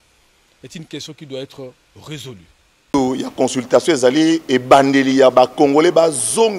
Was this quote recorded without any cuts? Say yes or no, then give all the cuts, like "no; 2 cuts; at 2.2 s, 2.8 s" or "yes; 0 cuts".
no; 1 cut; at 2.9 s